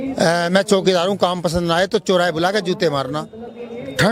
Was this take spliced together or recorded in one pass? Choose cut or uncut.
uncut